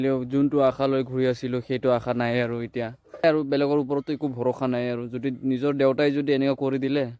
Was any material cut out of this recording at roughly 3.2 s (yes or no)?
yes